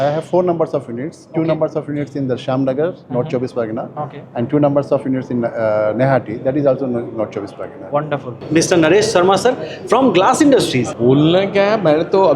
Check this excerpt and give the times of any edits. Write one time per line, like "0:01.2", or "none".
0:08.4
0:10.9